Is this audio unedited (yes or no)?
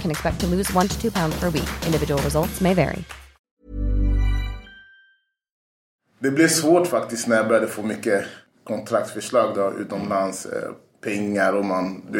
no